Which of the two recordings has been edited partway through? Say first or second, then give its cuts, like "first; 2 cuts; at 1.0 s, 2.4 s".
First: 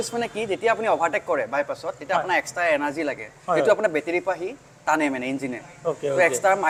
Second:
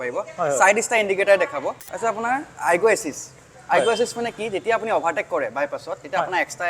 second; 1 cut; at 1.8 s